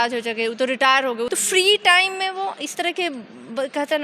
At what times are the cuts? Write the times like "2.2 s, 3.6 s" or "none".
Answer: 1.3 s